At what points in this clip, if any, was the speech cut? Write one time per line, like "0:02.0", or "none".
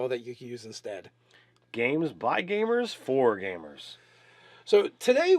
0:01.4

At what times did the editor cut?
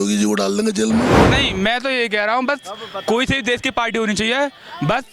0:01.2

